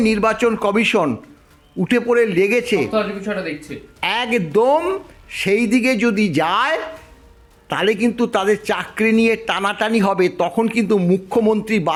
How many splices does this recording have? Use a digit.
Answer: 0